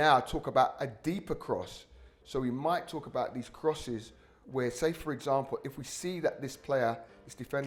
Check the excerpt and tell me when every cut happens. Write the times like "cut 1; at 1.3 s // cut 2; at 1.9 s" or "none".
cut 1; at 4.3 s